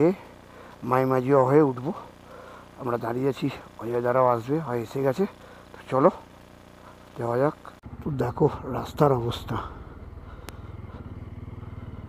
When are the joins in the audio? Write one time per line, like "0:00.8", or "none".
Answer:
0:07.7